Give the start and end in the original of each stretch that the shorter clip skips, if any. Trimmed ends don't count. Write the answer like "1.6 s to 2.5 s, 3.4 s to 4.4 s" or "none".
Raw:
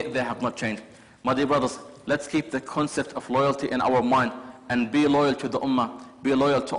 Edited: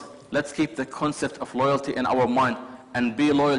none